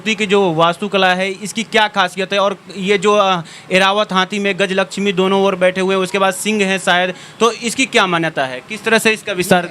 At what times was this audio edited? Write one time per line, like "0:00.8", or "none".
none